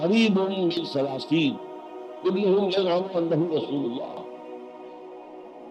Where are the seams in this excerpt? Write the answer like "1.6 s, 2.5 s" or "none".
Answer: 4.7 s